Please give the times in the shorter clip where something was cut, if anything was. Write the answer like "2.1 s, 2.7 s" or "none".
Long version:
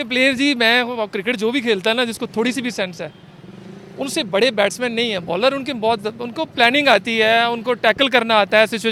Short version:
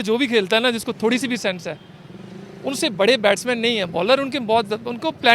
none